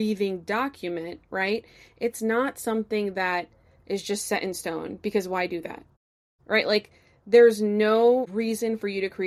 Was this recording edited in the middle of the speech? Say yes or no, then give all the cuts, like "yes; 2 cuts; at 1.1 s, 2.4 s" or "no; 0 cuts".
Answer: no; 0 cuts